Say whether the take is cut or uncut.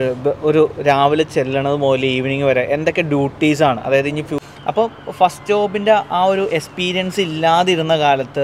cut